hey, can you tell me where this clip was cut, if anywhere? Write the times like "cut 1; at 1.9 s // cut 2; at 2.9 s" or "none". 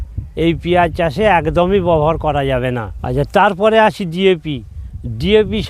none